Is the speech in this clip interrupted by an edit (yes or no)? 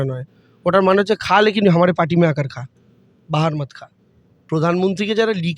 yes